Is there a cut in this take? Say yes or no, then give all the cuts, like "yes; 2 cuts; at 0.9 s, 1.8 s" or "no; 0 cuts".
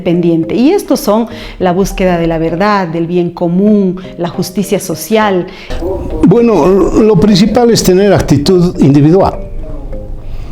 yes; 1 cut; at 5.6 s